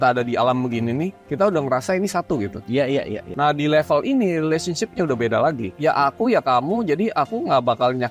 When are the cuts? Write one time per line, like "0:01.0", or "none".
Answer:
0:03.3